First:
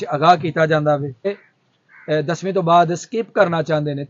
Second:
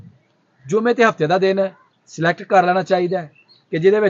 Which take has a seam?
first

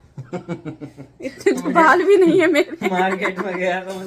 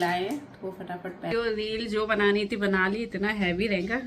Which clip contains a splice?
second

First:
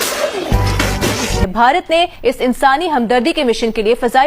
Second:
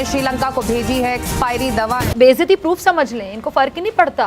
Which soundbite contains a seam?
first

